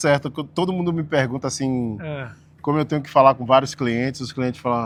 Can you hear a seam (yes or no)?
no